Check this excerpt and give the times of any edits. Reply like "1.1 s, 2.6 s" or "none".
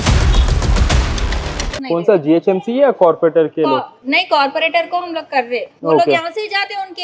1.8 s

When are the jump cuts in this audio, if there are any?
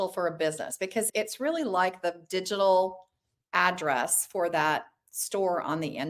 none

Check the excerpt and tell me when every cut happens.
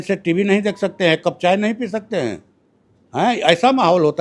none

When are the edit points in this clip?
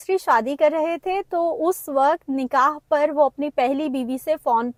none

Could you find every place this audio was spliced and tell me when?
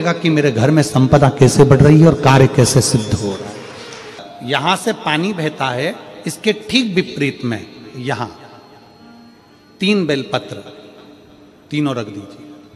none

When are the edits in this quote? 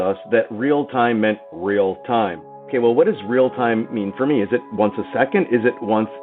2.6 s

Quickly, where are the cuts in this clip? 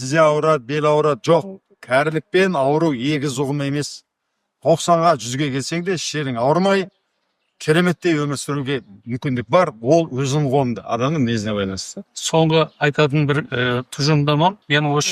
none

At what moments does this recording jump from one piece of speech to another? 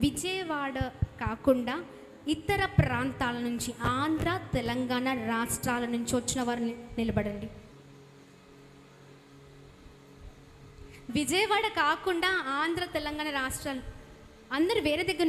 7.7 s

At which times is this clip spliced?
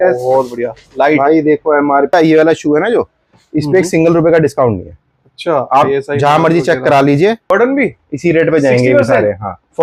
2.1 s, 7.5 s

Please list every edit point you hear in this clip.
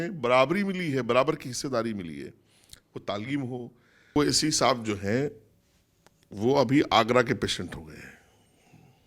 4.2 s

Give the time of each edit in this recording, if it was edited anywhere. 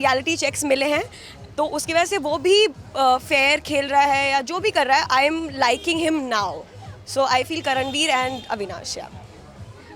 none

